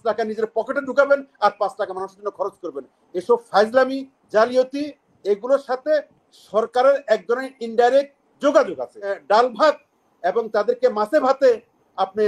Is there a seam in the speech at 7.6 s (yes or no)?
no